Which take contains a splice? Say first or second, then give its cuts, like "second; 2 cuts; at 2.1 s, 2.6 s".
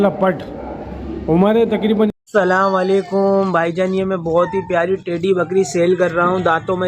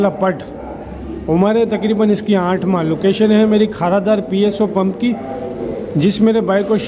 first; 1 cut; at 2.1 s